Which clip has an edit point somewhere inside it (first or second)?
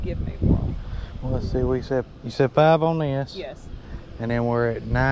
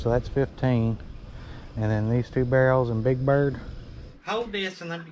second